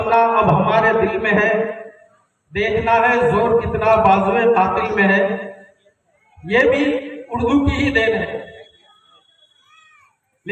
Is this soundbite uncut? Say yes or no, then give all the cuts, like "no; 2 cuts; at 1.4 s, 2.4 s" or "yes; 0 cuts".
yes; 0 cuts